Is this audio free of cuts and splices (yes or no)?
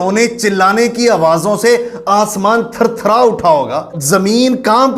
no